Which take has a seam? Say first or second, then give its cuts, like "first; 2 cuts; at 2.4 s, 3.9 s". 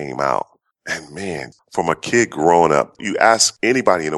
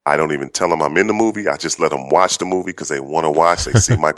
first; 1 cut; at 1.5 s